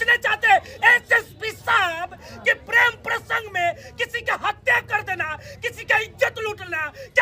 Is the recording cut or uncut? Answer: uncut